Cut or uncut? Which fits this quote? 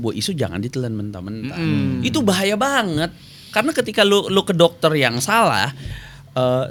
uncut